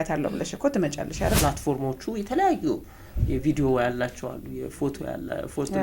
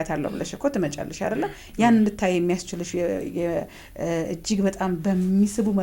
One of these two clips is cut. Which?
first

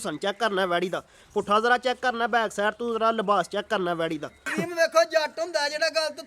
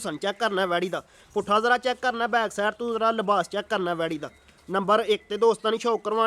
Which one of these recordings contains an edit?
first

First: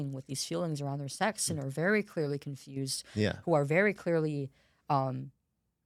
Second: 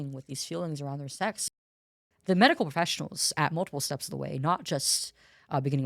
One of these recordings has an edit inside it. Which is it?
second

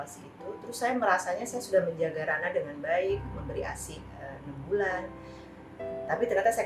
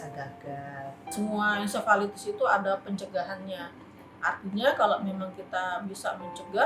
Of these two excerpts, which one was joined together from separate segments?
second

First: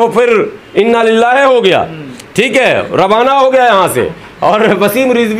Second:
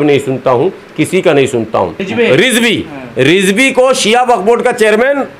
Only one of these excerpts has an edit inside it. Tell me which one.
second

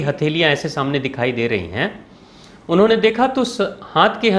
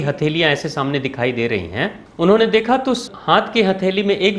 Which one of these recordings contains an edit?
second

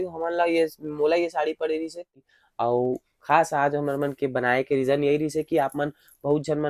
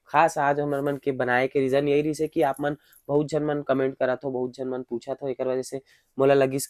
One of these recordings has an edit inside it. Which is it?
first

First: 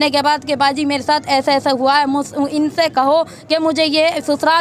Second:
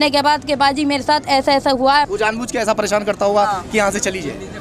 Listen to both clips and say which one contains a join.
second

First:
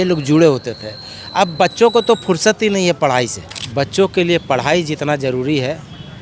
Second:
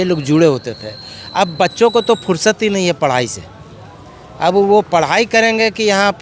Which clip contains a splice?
first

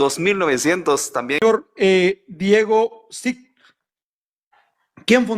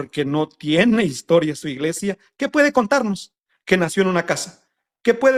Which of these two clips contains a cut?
first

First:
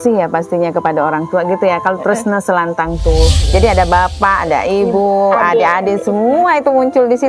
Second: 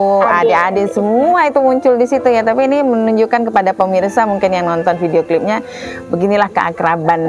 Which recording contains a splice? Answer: first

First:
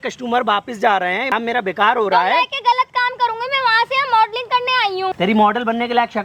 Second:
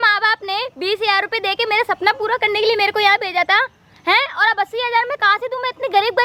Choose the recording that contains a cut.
first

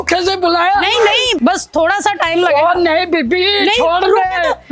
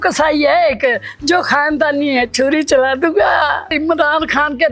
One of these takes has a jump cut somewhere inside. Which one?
second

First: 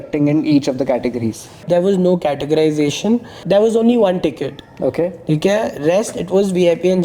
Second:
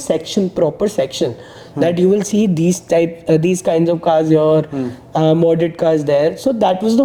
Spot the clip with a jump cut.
first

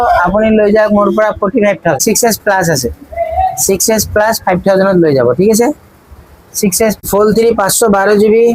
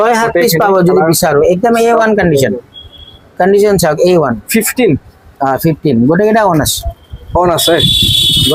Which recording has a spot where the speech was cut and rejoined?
first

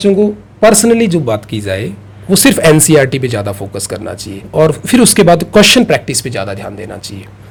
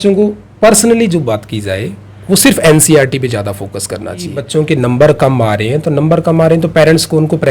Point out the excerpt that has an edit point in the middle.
second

